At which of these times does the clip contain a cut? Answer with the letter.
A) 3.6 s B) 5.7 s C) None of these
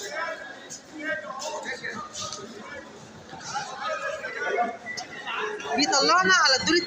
B